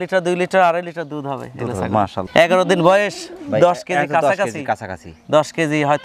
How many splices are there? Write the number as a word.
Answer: one